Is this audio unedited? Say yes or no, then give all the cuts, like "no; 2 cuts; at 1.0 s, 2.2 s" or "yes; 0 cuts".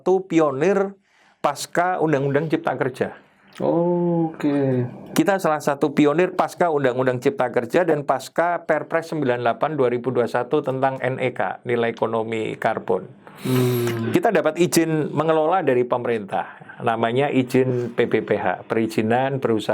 yes; 0 cuts